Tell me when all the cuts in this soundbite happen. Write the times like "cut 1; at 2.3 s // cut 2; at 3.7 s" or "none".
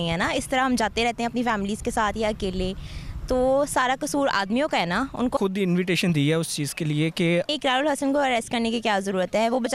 cut 1; at 5.4 s // cut 2; at 7.5 s